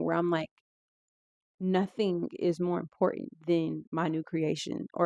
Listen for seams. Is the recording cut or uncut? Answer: uncut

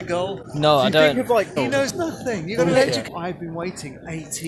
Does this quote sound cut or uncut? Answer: cut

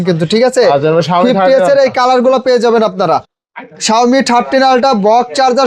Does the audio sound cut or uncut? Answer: uncut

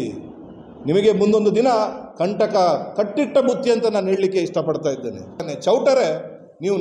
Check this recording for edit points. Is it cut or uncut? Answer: cut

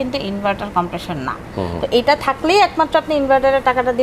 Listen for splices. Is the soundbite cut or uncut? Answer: uncut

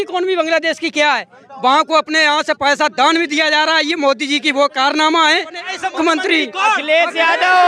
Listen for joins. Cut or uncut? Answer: cut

